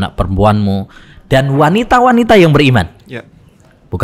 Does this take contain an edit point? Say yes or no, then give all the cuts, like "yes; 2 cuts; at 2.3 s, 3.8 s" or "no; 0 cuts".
no; 0 cuts